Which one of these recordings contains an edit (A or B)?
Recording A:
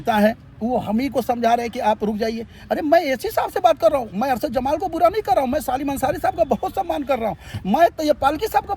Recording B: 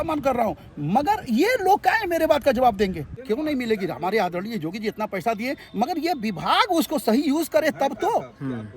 B